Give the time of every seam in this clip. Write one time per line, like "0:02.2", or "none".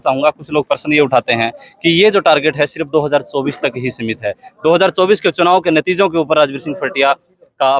none